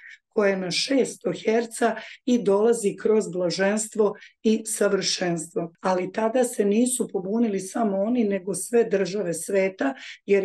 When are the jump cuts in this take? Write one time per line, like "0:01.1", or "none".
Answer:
0:05.7